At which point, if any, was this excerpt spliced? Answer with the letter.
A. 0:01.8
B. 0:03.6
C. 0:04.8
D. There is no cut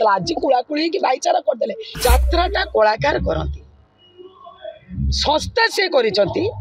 A